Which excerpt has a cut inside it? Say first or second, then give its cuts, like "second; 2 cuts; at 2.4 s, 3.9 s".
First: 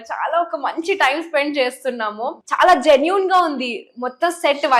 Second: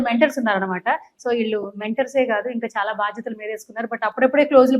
first; 1 cut; at 2.4 s